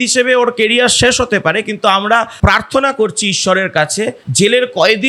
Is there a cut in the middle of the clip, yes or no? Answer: no